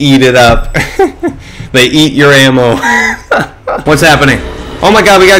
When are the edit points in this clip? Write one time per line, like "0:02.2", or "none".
0:03.8